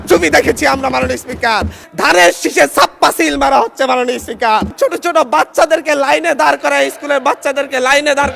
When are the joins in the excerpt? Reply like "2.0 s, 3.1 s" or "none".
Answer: 1.8 s, 4.7 s